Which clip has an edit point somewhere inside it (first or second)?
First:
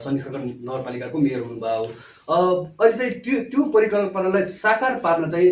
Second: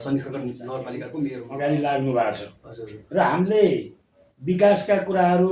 second